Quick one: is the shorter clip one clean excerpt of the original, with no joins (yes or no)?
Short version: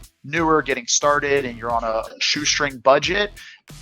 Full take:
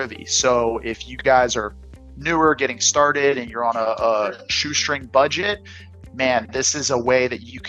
no